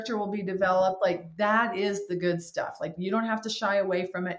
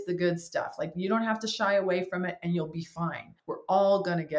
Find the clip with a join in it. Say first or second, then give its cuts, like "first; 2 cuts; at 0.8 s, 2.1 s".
second; 1 cut; at 3.3 s